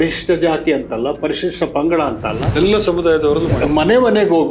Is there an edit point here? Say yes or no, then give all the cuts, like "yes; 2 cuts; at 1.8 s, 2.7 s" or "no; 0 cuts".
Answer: yes; 2 cuts; at 2.5 s, 3.6 s